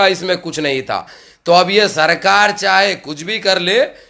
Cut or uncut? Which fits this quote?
uncut